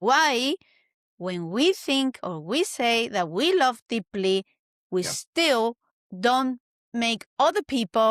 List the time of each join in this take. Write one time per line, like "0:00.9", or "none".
none